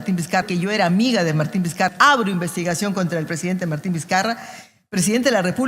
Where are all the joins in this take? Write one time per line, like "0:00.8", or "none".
0:01.9